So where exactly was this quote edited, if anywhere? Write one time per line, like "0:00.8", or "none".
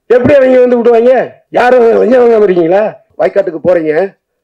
0:01.4
0:03.0